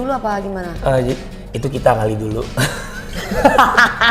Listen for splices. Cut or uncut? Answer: uncut